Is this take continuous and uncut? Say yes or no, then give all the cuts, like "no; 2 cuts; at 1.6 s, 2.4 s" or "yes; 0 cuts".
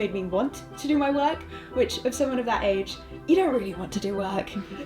yes; 0 cuts